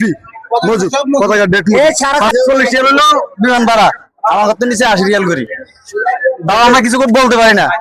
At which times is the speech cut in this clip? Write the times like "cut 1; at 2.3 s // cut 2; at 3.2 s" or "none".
cut 1; at 2.3 s

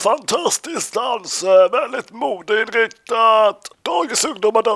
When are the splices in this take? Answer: cut 1; at 3.7 s

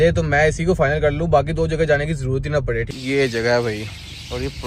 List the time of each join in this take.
cut 1; at 2.9 s

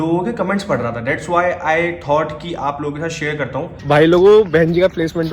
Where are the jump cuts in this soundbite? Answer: cut 1; at 3.7 s

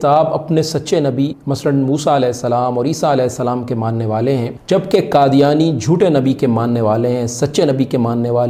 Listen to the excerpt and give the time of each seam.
cut 1; at 1.4 s // cut 2; at 4.5 s

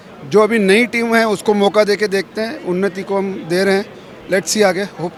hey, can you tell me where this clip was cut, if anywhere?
none

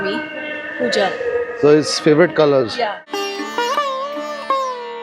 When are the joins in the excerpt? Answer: cut 1; at 3.0 s

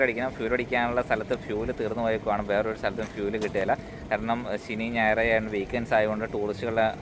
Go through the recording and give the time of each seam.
none

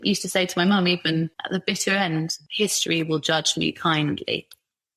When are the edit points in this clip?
cut 1; at 1.4 s // cut 2; at 2.4 s

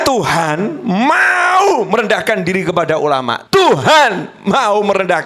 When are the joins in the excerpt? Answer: cut 1; at 3.4 s

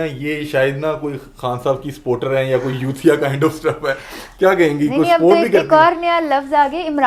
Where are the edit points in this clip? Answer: none

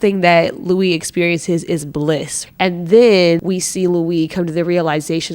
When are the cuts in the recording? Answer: cut 1; at 2.4 s // cut 2; at 3.4 s

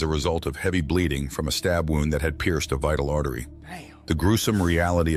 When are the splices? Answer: none

